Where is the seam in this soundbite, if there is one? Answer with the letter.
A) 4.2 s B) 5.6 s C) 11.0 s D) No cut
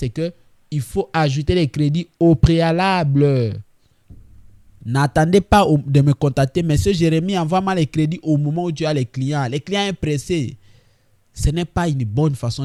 D